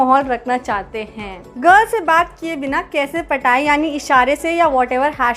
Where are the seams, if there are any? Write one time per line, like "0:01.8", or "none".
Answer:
0:01.5

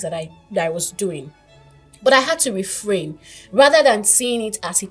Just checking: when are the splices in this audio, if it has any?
none

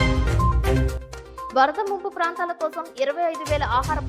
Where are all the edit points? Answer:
0:00.9

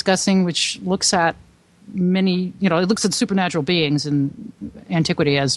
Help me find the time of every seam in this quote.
none

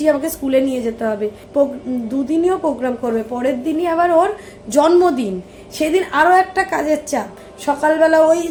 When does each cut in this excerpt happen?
none

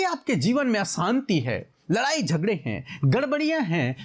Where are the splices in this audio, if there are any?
none

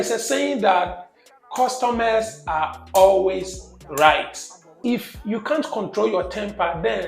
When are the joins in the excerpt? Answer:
0:04.7

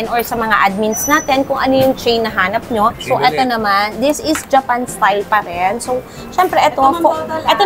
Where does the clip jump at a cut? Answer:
0:03.0

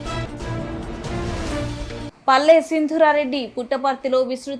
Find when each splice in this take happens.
none

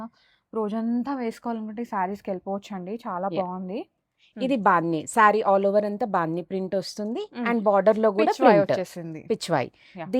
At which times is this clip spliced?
none

